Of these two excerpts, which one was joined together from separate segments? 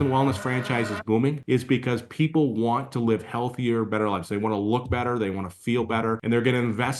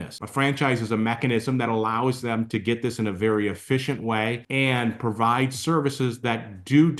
first; 2 cuts; at 1.4 s, 6.2 s

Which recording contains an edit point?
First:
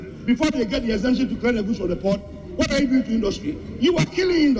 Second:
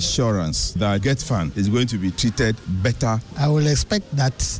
second; 2 cuts; at 1.1 s, 3.3 s

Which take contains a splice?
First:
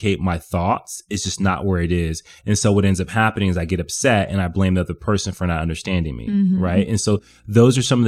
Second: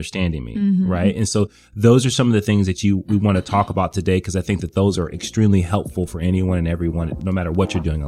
second; 1 cut; at 7.2 s

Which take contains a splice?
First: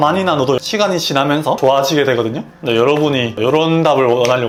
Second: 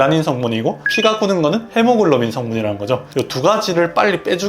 second; 1 cut; at 3.1 s

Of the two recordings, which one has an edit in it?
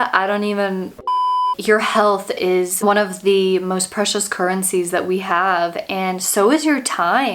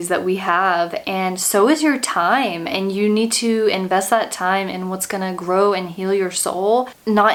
first; 2 cuts; at 1.4 s, 2.8 s

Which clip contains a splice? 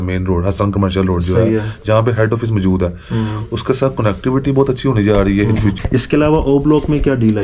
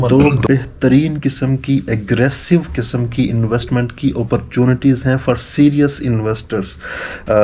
first; 1 cut; at 5.8 s

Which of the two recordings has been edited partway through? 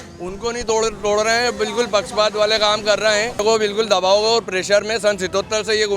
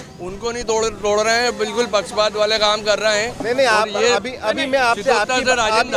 first; 1 cut; at 3.4 s

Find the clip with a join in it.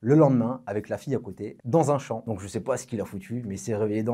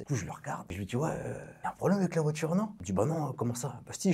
second; 1 cut; at 2.8 s

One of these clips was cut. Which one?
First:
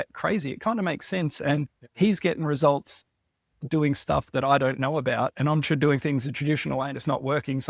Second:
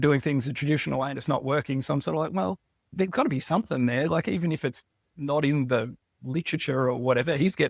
second; 1 cut; at 2.9 s

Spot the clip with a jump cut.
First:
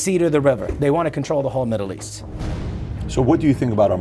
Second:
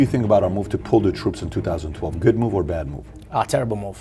first; 1 cut; at 2.6 s

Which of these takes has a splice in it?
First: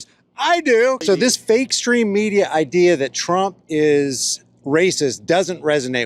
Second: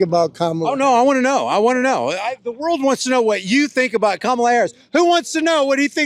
first; 1 cut; at 1.0 s

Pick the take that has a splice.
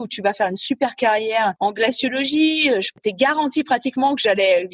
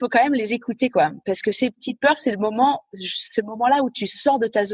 first; 2 cuts; at 1.6 s, 2.9 s

